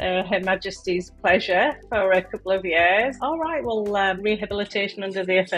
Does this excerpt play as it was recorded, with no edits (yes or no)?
no